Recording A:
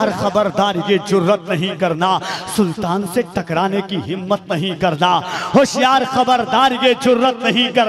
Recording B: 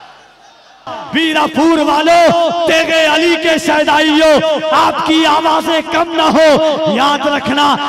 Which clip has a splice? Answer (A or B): B